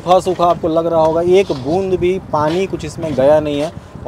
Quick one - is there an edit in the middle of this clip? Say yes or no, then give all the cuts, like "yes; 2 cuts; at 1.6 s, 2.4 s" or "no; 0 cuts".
no; 0 cuts